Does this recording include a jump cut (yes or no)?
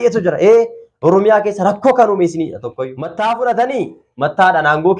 yes